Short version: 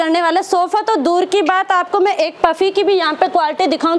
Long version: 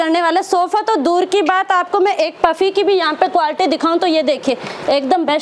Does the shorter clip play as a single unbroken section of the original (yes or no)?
yes